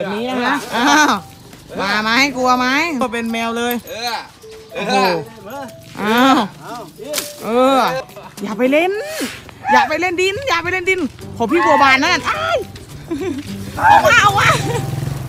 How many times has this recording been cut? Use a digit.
2